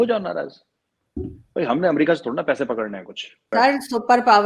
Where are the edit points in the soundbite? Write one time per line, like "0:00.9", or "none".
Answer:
0:03.5